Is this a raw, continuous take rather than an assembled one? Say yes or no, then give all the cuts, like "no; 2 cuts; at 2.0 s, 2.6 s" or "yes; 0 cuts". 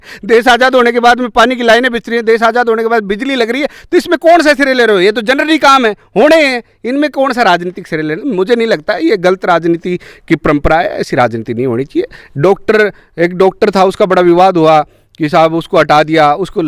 yes; 0 cuts